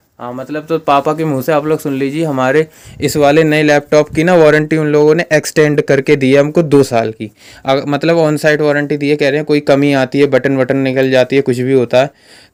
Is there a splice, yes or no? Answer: no